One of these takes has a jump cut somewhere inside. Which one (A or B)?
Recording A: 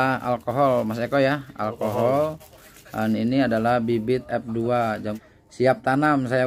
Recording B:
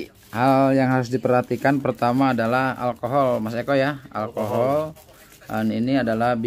A